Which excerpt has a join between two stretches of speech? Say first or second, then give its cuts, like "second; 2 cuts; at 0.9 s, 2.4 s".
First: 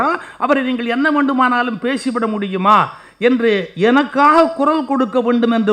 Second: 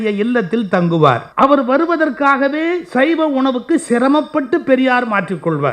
second; 1 cut; at 1.3 s